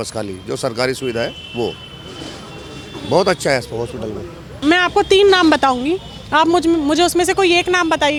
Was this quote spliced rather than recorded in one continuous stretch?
no; 0 cuts

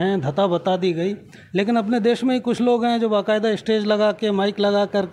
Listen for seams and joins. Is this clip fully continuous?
yes; 0 cuts

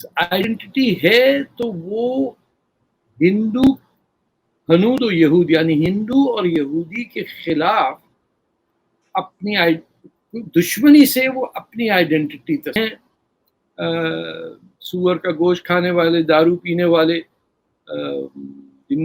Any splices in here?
yes; 1 cut; at 12.8 s

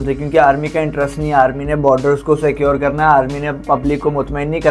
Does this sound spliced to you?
no; 0 cuts

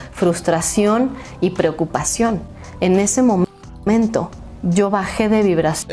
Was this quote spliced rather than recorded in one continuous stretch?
no; 0 cuts

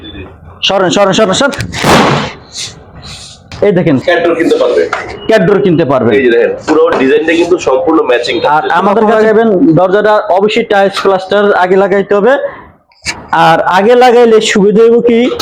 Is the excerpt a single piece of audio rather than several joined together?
no; 2 cuts; at 4.0 s, 9.0 s

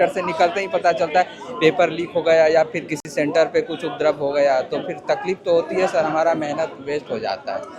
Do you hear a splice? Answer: no; 0 cuts

